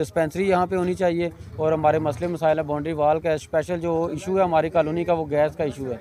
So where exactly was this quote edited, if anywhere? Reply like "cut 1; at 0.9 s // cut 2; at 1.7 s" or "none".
none

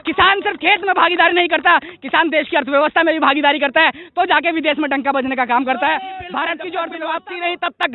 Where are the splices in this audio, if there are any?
cut 1; at 7.0 s

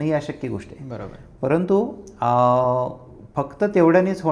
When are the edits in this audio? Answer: none

